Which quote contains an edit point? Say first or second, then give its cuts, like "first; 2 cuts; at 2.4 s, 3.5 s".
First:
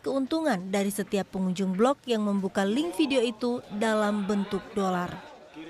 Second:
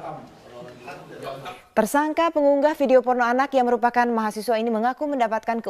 first; 1 cut; at 3.6 s